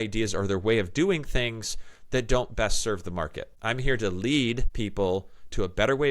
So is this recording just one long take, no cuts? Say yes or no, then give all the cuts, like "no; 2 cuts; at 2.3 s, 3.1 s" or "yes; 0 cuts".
no; 2 cuts; at 3.5 s, 4.7 s